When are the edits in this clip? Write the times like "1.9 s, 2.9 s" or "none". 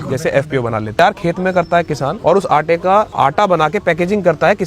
1.0 s, 2.1 s, 3.1 s